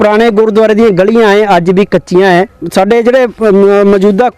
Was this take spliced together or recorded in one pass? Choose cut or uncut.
cut